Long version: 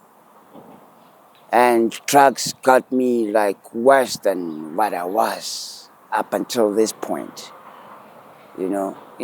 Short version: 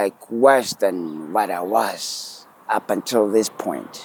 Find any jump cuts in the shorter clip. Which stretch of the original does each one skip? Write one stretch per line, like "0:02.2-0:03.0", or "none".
none